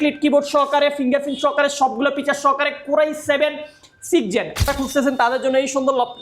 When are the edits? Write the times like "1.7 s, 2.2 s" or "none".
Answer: 4.7 s